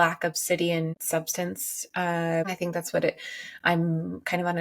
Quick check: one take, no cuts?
no; 2 cuts; at 1.0 s, 2.5 s

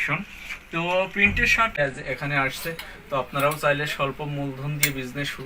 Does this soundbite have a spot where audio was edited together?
yes; 1 cut; at 1.7 s

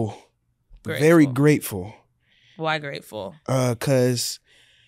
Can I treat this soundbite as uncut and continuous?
yes; 0 cuts

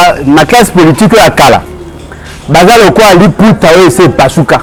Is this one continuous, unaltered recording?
yes; 0 cuts

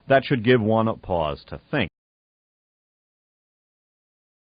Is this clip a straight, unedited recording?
yes; 0 cuts

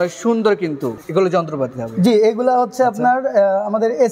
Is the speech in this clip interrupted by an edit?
yes; 1 cut; at 1.0 s

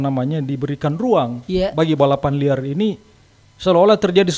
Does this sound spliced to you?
no; 0 cuts

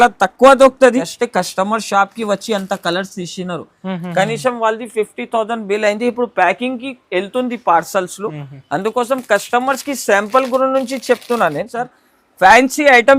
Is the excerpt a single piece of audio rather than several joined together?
no; 2 cuts; at 1.2 s, 12.0 s

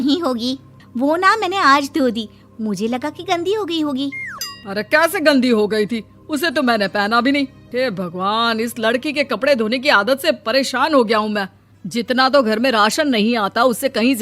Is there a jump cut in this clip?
yes; 1 cut; at 4.8 s

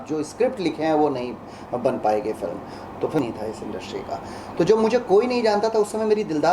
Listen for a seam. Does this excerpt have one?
yes; 1 cut; at 3.2 s

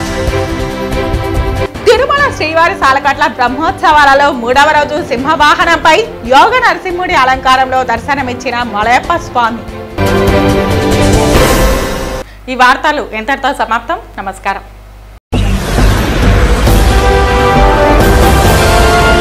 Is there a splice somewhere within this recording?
no; 0 cuts

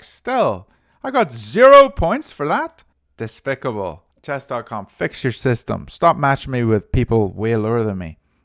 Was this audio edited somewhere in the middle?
yes; 1 cut; at 4.1 s

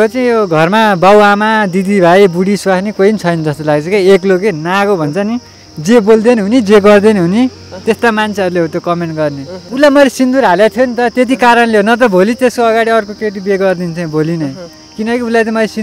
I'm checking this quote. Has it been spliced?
yes; 1 cut; at 9.6 s

